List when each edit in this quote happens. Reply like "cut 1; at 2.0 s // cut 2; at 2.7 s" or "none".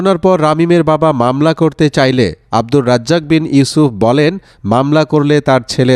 none